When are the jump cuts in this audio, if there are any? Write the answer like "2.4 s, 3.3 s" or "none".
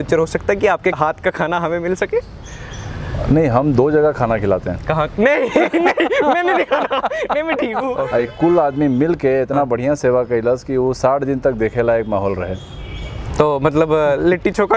1.0 s, 8.0 s